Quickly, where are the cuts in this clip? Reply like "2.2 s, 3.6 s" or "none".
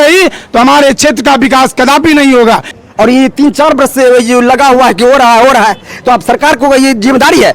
2.7 s

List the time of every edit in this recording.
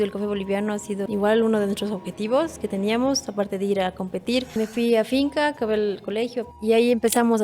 1.0 s, 4.6 s, 6.4 s

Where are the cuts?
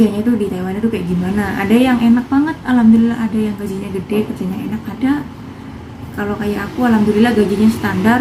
none

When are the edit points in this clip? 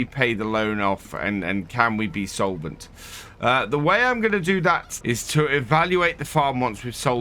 4.9 s

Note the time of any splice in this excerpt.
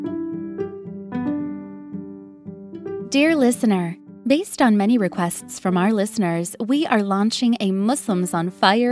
3.0 s

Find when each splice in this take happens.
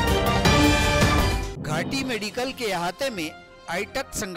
1.2 s

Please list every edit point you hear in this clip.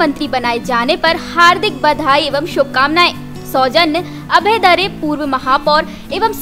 none

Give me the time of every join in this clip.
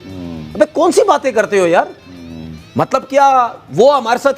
none

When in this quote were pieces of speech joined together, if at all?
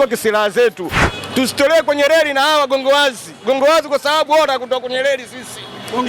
1.0 s

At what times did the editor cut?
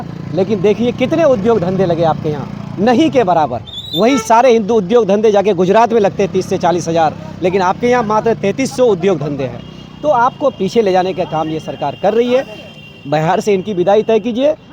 none

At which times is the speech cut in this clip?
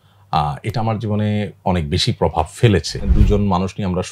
3.0 s

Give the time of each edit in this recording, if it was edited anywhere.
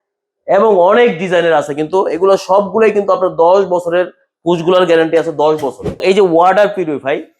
6.0 s

